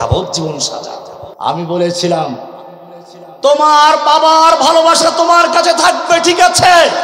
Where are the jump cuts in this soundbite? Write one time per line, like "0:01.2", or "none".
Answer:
0:01.2